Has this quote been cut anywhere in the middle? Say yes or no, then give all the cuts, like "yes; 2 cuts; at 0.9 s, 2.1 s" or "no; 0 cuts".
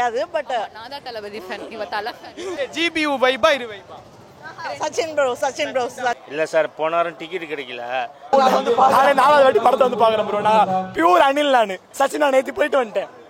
yes; 4 cuts; at 2.6 s, 6.2 s, 8.2 s, 11.9 s